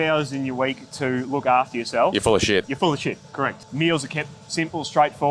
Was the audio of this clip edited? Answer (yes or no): yes